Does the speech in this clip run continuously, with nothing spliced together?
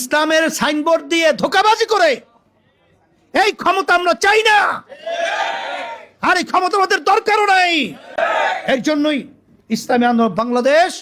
yes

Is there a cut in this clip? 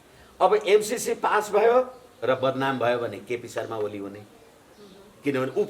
no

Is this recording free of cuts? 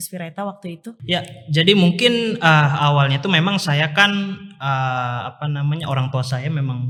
yes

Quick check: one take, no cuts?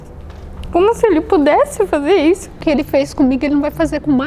no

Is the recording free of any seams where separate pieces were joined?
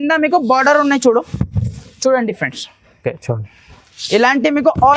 yes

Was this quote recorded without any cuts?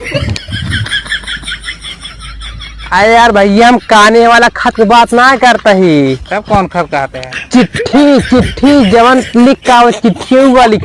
no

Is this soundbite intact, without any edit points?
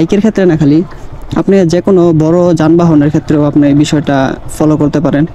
yes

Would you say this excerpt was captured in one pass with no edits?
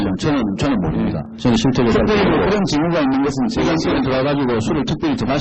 no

